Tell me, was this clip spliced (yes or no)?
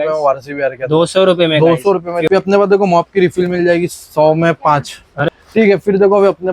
yes